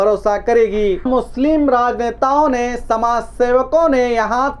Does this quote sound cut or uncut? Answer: cut